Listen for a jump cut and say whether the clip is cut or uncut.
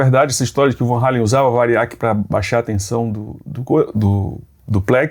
uncut